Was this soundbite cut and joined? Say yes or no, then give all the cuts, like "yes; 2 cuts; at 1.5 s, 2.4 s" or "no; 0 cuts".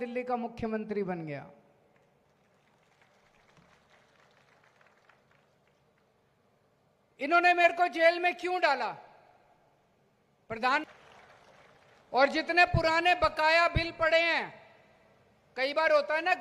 yes; 1 cut; at 10.8 s